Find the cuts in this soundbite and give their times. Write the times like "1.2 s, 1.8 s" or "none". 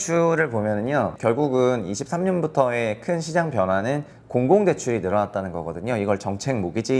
1.1 s, 4.1 s

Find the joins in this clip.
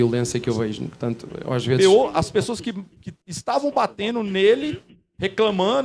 1.8 s

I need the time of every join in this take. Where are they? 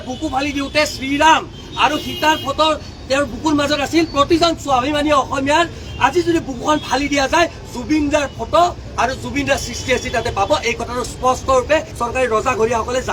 none

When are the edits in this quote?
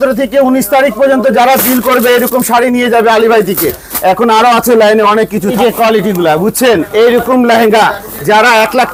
none

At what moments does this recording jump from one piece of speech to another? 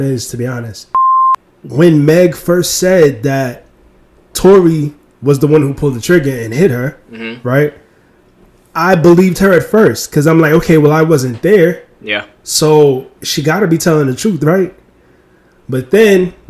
1.3 s

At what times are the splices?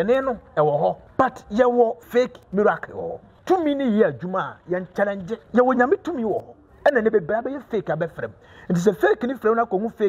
1.0 s, 2.0 s, 3.3 s, 5.4 s

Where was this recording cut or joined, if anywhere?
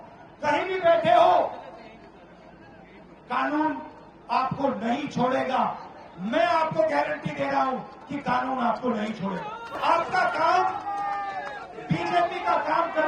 9.8 s

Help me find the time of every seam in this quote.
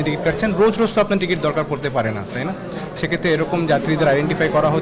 none

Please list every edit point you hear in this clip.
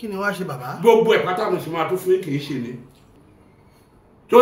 3.2 s

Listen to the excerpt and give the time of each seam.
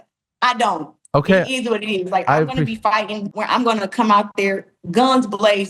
3.3 s

